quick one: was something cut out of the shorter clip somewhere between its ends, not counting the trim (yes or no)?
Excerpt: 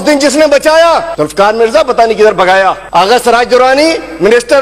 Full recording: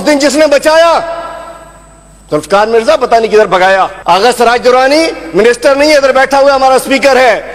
yes